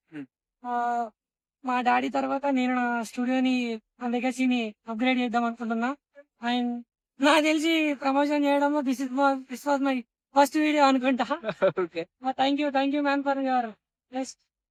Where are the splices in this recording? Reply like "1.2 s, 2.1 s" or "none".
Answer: none